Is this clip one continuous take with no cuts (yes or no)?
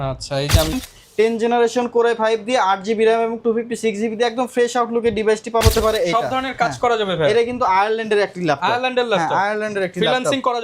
no